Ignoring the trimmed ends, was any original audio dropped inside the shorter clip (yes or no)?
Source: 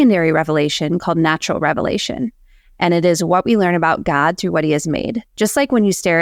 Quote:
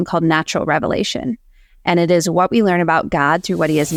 no